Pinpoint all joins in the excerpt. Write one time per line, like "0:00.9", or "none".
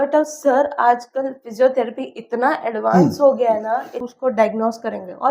0:04.1